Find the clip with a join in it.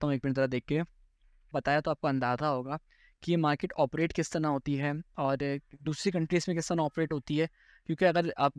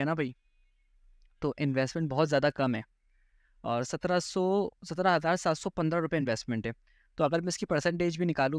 first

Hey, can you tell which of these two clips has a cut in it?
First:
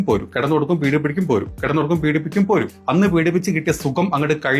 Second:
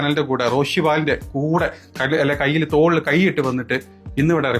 first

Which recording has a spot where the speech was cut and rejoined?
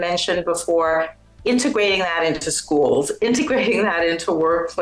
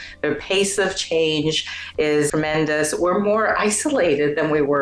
second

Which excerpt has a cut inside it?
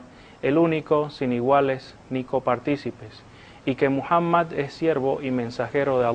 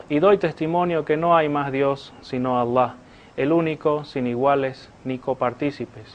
first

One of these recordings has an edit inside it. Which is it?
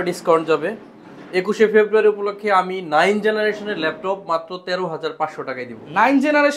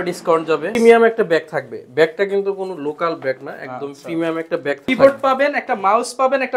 second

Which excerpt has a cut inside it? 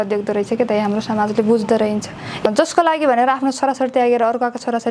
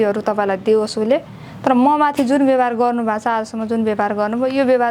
first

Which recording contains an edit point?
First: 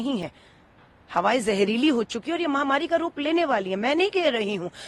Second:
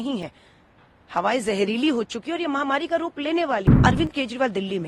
second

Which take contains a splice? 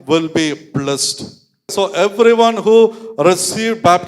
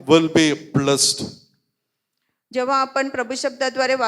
first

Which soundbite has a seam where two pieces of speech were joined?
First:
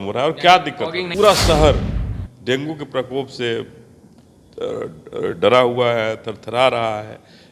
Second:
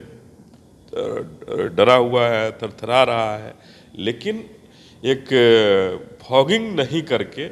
first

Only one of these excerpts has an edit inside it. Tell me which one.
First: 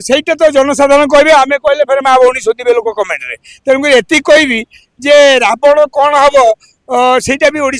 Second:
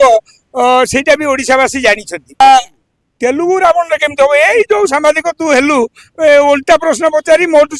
second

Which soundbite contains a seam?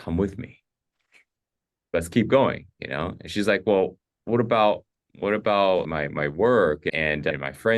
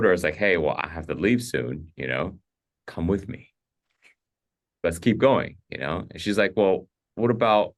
first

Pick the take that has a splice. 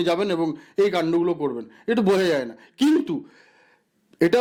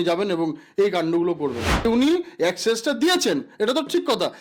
second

